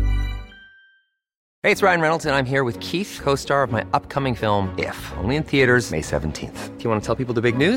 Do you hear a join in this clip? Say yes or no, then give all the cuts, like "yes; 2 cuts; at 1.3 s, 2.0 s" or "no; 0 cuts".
no; 0 cuts